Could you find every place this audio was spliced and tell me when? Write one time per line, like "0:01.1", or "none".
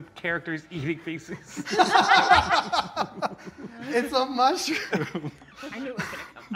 0:05.5